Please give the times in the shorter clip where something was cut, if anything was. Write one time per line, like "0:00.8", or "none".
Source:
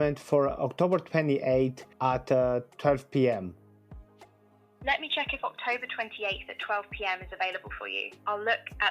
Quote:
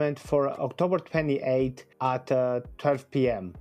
none

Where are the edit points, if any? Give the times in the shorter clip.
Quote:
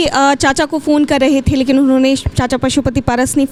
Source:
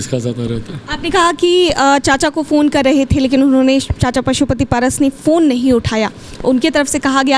none

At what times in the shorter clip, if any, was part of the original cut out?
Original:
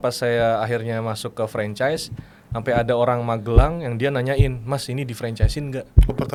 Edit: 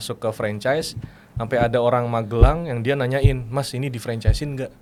none

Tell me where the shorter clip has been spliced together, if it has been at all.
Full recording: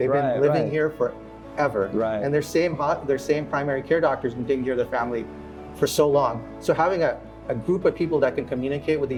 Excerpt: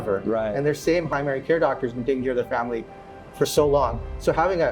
0:01.1

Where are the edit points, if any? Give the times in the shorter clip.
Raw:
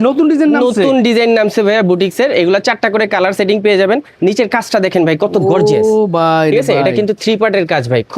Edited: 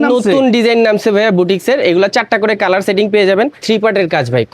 0:03.6

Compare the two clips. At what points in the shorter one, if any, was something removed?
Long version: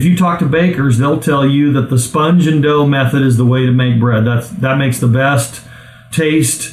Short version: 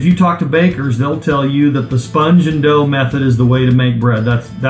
none

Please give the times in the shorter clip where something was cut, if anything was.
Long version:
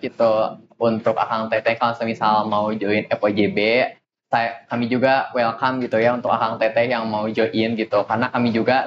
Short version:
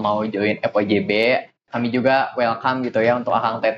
0:01.6

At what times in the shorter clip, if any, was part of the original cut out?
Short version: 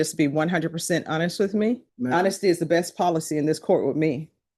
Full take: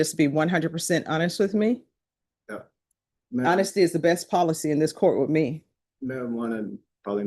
0:01.9

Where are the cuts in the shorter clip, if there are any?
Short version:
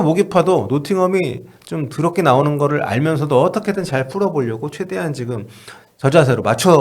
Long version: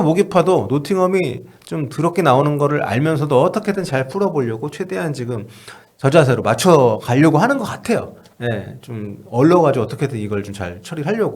none

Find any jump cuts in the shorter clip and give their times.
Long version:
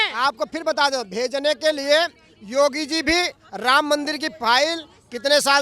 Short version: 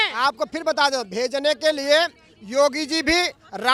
none

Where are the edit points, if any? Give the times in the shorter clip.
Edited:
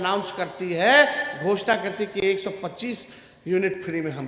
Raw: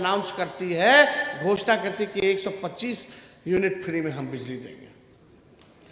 none

